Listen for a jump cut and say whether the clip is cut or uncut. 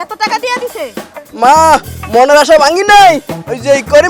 cut